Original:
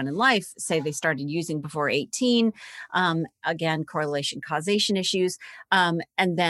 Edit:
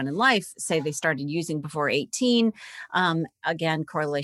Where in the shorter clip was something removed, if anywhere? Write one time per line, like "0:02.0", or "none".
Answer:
none